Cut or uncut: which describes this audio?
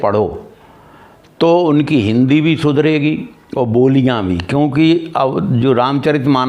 uncut